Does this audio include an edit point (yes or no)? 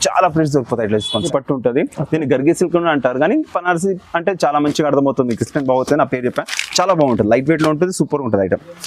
yes